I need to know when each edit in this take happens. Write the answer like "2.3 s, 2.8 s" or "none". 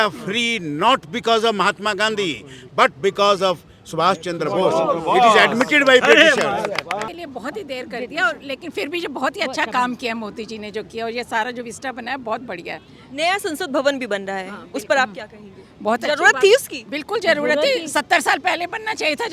7.1 s